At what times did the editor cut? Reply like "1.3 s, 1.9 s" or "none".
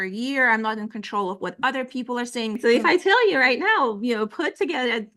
2.6 s